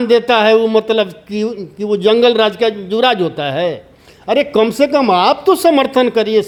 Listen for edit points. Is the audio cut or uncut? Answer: uncut